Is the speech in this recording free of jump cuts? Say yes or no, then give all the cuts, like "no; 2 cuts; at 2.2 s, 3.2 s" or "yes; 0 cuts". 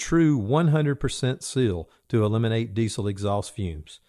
yes; 0 cuts